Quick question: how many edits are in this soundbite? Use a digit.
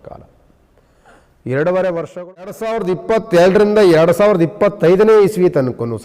1